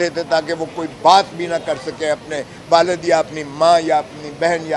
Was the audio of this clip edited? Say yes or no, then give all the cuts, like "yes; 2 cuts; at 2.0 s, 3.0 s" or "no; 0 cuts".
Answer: no; 0 cuts